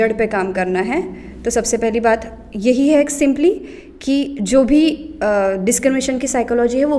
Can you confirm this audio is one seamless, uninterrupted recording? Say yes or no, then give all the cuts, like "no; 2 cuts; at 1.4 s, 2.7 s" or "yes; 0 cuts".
yes; 0 cuts